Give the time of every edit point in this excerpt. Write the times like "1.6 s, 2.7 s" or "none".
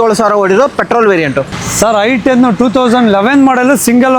none